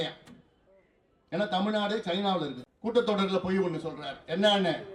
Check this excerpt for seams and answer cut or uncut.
cut